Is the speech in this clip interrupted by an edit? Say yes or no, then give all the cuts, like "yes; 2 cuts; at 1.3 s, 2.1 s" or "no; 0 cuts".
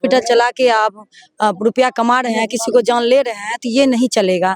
no; 0 cuts